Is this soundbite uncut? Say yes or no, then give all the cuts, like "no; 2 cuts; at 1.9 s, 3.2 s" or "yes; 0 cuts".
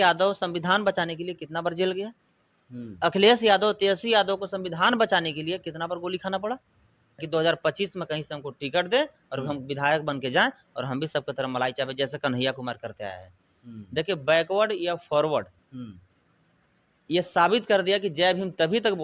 no; 1 cut; at 7.2 s